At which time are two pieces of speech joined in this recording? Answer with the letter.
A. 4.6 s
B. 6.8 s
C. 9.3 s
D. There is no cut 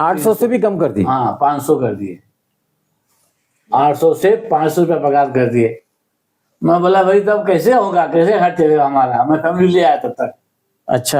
D